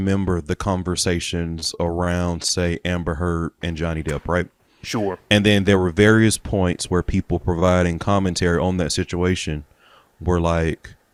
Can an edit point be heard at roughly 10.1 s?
no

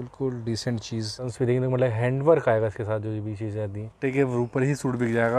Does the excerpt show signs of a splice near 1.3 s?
yes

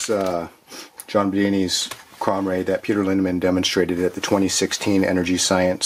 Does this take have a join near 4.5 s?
no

